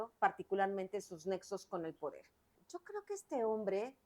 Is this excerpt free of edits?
no; 1 cut; at 2.6 s

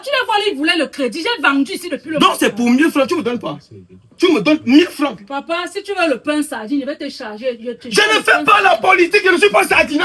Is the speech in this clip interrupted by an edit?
no; 0 cuts

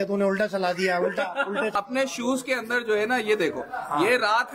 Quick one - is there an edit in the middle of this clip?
yes; 1 cut; at 1.7 s

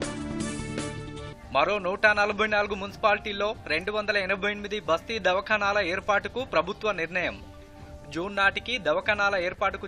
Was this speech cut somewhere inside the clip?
yes; 1 cut; at 1.0 s

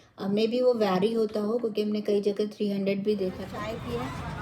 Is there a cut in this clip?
yes; 1 cut; at 3.5 s

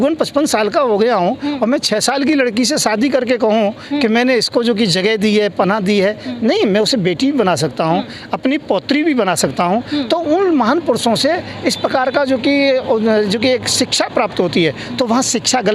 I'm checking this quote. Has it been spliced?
no; 0 cuts

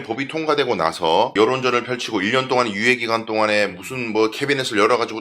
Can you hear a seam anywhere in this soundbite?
yes; 1 cut; at 1.3 s

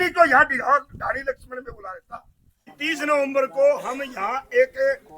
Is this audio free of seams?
no; 1 cut; at 2.7 s

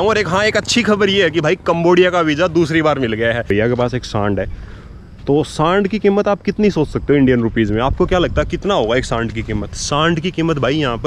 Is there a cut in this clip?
yes; 1 cut; at 3.5 s

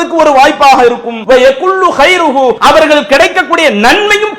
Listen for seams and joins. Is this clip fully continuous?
no; 2 cuts; at 1.1 s, 2.6 s

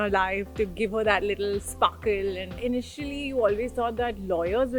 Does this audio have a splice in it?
yes; 1 cut; at 2.6 s

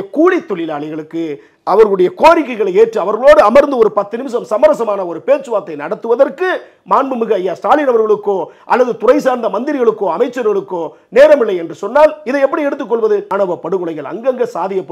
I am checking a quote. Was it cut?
yes; 1 cut; at 13.3 s

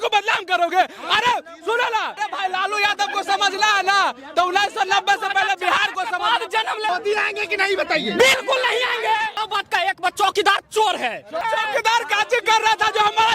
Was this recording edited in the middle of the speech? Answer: yes; 4 cuts; at 2.2 s, 6.9 s, 9.4 s, 11.4 s

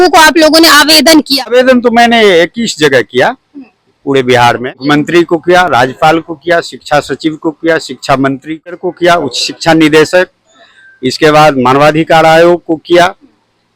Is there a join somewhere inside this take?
yes; 3 cuts; at 1.5 s, 4.8 s, 8.7 s

